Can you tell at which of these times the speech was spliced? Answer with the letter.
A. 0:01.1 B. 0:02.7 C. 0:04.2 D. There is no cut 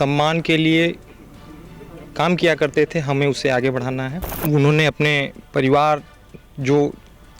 C